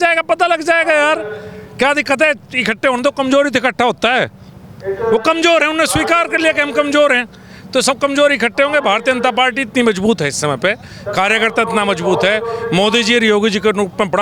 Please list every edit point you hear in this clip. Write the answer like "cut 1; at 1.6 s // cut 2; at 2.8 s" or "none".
none